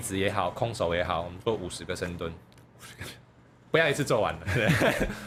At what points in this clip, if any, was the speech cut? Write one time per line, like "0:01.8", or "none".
none